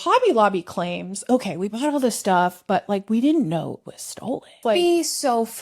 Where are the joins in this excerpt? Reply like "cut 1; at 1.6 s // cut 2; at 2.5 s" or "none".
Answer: cut 1; at 4.6 s